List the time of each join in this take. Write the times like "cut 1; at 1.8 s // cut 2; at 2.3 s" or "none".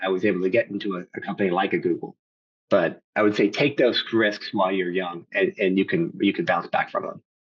cut 1; at 3.0 s